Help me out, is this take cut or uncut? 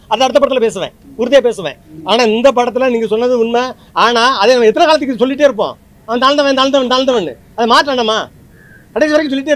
uncut